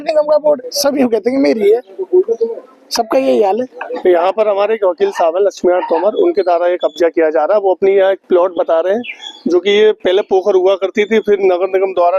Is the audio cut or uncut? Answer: cut